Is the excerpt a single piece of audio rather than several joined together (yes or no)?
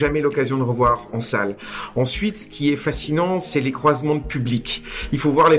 yes